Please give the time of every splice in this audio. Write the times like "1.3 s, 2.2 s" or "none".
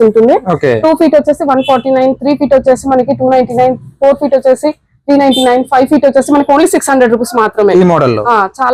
none